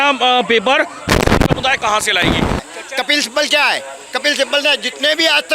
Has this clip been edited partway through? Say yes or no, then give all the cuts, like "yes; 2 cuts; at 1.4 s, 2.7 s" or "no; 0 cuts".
yes; 1 cut; at 2.6 s